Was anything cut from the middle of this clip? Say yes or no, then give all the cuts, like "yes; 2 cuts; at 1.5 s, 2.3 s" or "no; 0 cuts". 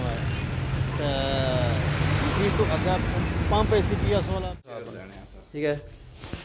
yes; 1 cut; at 4.7 s